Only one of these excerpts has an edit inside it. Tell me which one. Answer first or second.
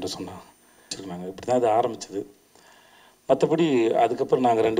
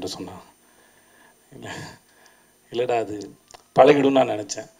first